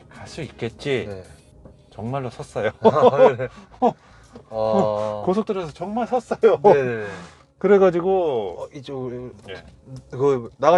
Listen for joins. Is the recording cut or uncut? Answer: uncut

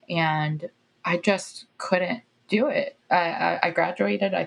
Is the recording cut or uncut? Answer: uncut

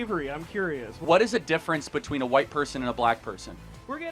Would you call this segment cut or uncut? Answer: cut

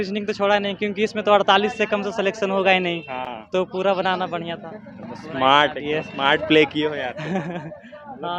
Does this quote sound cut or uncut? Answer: uncut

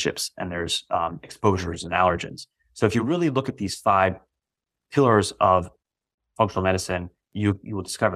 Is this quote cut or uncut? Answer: uncut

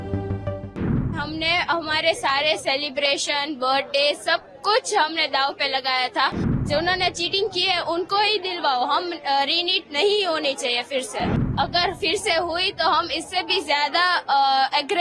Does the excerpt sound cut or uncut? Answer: cut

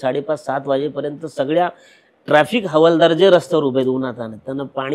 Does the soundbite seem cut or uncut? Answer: uncut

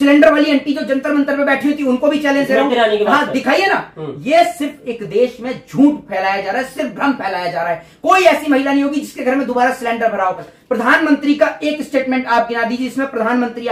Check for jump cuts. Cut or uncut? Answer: cut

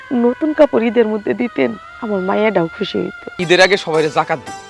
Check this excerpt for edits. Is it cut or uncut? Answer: cut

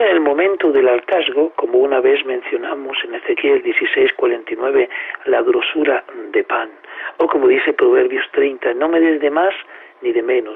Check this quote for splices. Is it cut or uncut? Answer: uncut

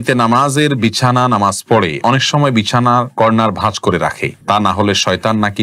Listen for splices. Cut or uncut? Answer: uncut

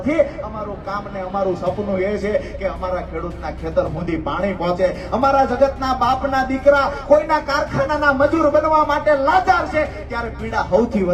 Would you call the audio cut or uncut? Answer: uncut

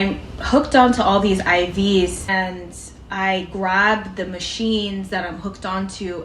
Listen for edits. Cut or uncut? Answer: cut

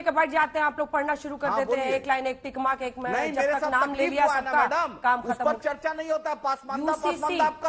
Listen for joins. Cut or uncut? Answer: uncut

